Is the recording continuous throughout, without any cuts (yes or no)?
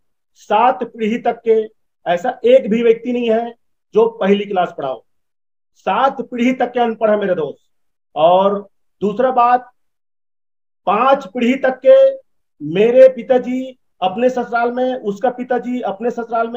yes